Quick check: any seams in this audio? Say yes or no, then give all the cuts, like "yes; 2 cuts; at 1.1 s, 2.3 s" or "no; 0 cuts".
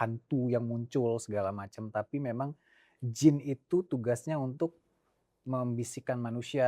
no; 0 cuts